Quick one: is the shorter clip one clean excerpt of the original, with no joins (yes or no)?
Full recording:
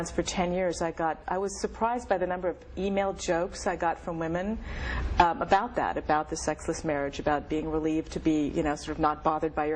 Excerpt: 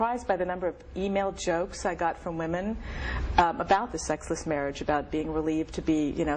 no